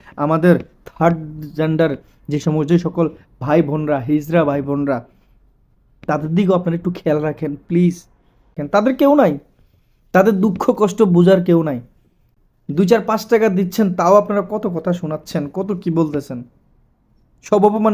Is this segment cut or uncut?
cut